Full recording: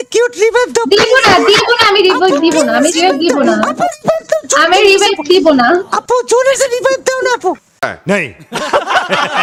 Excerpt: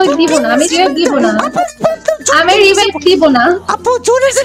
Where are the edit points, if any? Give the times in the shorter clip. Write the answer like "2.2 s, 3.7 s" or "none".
none